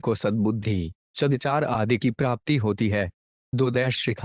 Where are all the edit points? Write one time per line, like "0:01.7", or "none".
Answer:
0:01.4

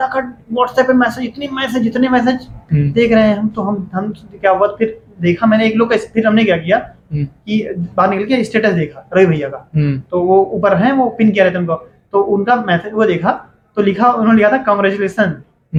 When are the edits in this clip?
none

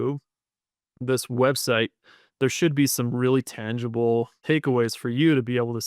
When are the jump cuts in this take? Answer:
0:04.4

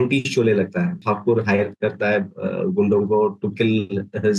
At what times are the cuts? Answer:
0:01.0

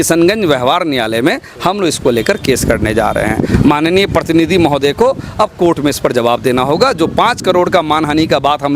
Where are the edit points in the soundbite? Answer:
none

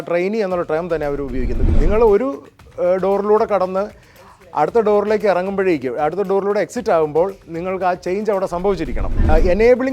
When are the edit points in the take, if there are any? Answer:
0:01.6
0:09.1

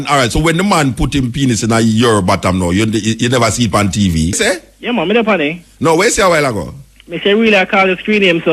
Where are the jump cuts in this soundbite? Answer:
0:04.4

